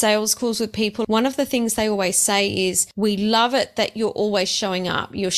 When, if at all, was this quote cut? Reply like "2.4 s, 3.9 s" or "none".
1.0 s, 2.9 s

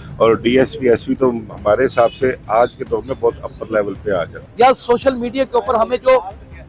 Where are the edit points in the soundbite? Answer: 4.4 s

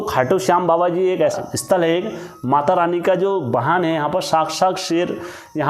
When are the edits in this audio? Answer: 1.4 s

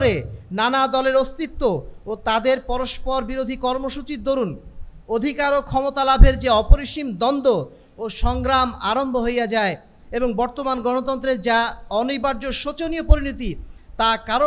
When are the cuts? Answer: none

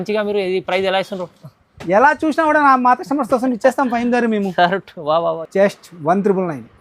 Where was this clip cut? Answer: 5.4 s

